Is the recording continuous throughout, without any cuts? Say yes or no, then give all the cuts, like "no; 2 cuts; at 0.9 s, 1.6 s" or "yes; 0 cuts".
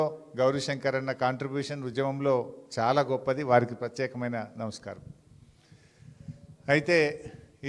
yes; 0 cuts